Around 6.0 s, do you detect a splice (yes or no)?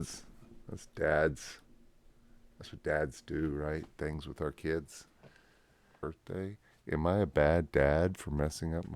yes